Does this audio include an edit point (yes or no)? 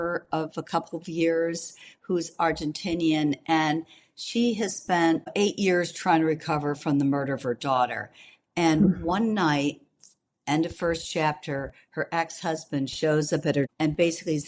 yes